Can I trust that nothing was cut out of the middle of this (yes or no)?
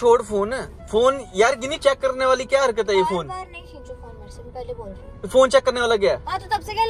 yes